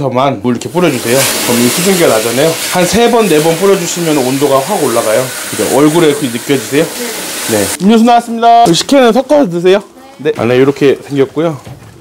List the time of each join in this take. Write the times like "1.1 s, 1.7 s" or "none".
7.7 s, 10.4 s